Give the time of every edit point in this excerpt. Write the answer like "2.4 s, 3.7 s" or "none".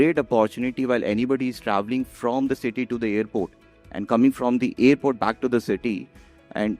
none

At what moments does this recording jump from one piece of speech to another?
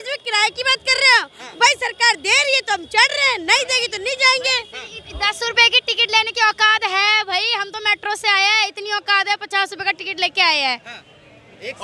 none

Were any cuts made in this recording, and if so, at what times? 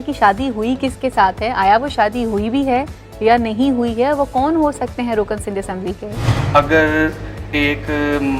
6.3 s

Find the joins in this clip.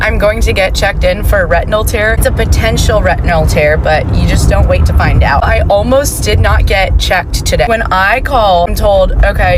none

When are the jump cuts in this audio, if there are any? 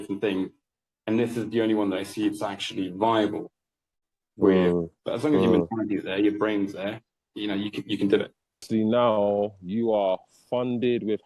5.0 s, 8.7 s

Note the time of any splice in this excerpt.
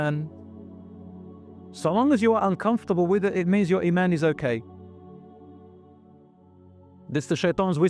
none

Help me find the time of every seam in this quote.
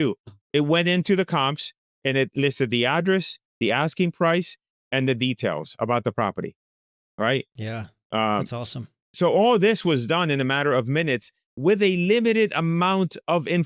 none

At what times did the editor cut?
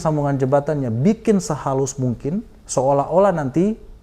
2.6 s

